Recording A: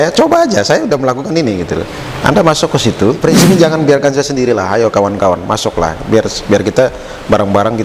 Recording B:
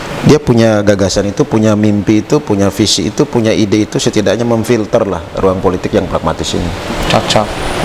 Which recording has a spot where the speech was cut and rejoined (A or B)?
A